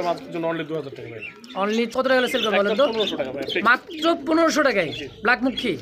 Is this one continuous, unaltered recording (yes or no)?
no